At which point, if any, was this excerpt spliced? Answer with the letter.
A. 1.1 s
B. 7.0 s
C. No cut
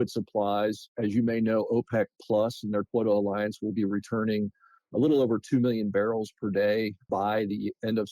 B